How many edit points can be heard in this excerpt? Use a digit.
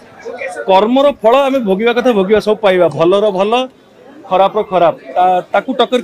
0